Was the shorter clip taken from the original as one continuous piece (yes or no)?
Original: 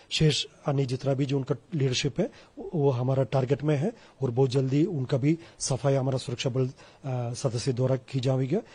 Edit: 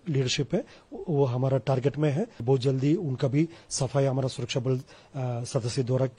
no